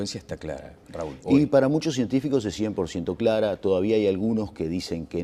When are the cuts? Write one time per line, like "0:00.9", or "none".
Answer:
0:04.2